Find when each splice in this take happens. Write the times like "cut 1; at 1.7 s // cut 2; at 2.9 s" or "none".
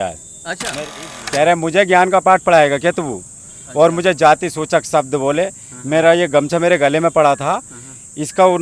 cut 1; at 1.0 s